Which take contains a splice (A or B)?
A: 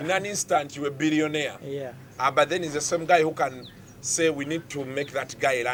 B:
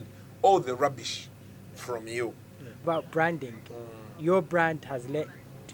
B